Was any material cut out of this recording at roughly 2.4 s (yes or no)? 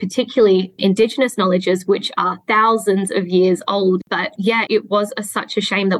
no